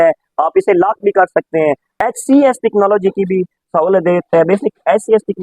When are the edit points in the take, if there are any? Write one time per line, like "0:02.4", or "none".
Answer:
0:01.9